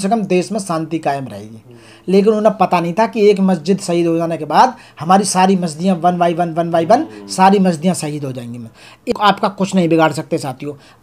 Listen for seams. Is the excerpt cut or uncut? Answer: cut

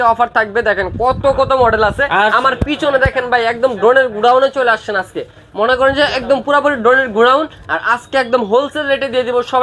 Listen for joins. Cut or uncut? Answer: uncut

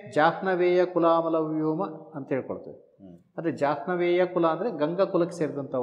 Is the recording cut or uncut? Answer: uncut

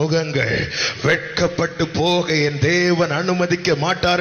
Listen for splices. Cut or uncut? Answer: uncut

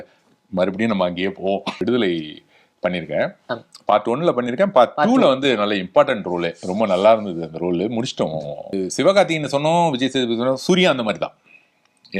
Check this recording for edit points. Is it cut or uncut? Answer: cut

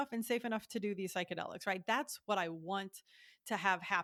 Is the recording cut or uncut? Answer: uncut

